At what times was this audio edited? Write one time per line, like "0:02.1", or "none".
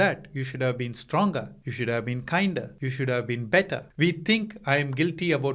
0:01.6
0:02.8
0:03.8